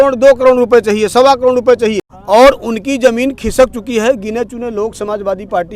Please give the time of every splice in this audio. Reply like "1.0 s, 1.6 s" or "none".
2.1 s

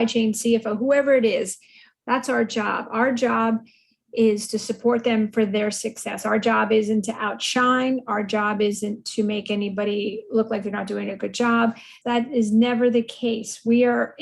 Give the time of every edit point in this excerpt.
11.9 s

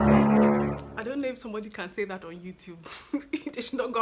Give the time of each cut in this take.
0.9 s

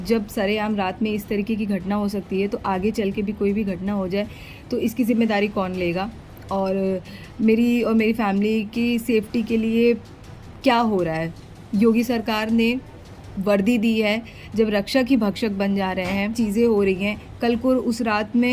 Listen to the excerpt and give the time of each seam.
16.3 s

